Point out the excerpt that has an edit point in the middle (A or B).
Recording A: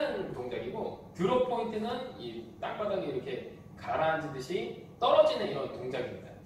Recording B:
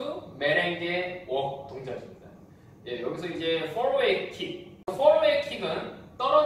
B